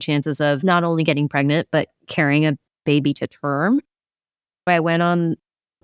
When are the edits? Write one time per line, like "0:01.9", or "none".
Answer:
0:04.2